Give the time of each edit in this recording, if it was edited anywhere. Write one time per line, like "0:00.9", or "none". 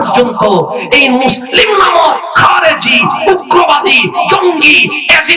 none